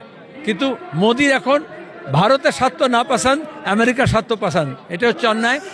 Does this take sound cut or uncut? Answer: uncut